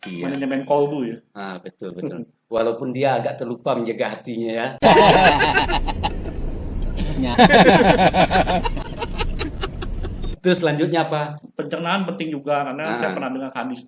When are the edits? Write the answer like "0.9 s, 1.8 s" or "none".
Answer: 10.3 s, 11.4 s

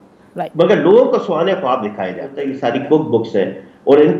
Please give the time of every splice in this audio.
2.5 s

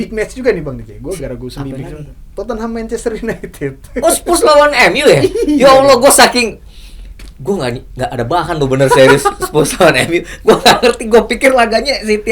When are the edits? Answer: none

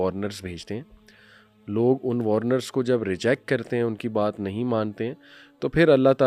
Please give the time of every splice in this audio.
none

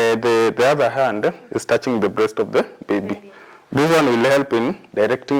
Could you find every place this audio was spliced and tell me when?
none

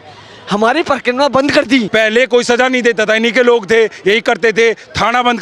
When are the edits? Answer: 1.9 s

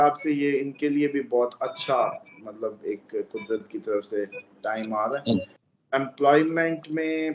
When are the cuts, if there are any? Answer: 5.4 s

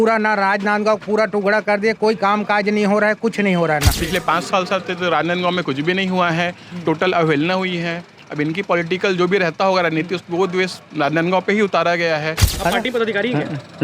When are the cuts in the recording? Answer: 3.9 s, 12.5 s

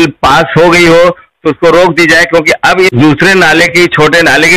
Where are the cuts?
2.9 s

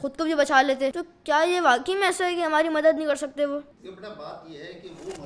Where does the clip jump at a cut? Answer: 1.1 s, 3.7 s

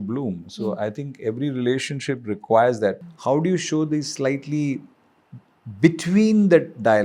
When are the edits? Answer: 3.1 s

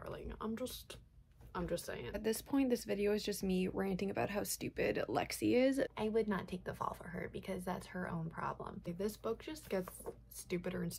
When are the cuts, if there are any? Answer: 2.2 s, 5.9 s, 8.8 s

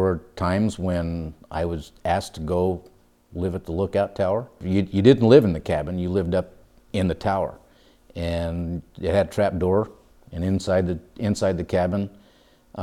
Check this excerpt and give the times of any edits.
4.6 s

